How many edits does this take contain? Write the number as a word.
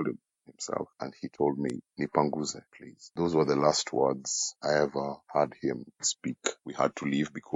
one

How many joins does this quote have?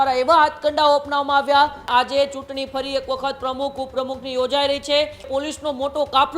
two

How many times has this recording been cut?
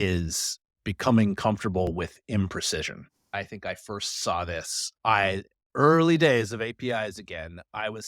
one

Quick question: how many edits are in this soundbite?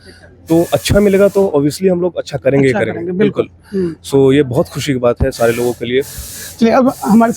zero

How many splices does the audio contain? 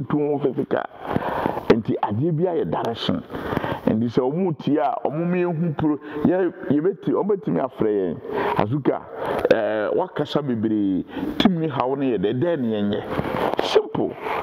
zero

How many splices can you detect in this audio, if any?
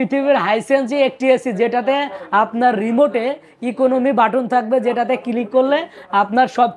zero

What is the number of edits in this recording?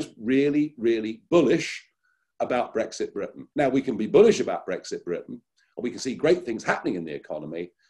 one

